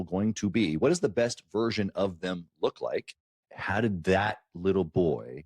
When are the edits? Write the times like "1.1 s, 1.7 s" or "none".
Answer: 3.4 s